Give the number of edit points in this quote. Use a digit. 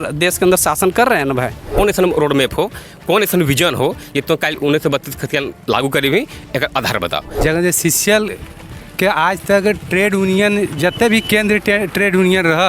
2